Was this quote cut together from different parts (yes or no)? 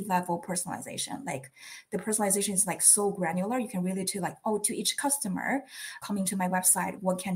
yes